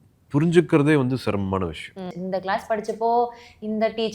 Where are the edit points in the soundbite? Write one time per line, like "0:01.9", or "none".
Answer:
0:02.1